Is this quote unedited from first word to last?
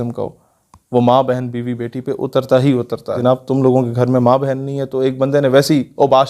no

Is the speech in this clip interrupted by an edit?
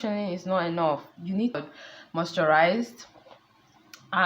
yes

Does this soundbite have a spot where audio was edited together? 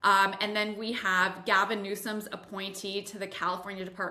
no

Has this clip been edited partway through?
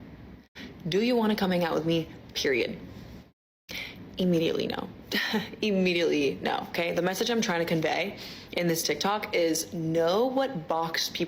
yes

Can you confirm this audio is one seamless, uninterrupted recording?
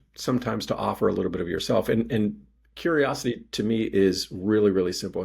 yes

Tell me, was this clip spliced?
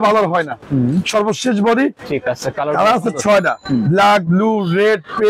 yes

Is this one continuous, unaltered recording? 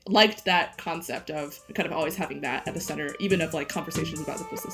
no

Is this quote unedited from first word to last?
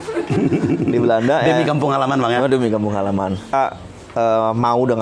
no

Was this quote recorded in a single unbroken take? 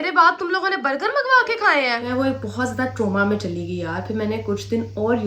no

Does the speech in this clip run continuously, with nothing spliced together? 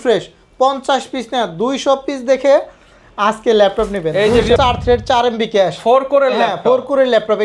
no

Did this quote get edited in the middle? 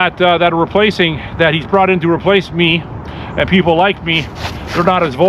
no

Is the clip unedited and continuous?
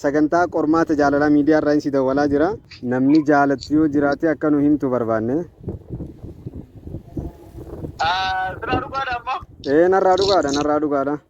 no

